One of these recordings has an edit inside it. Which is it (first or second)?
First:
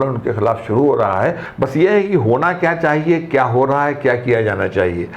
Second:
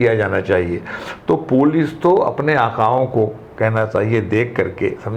first